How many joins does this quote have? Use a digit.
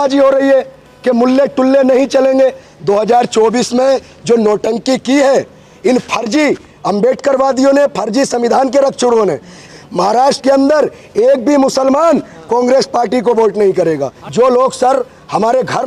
3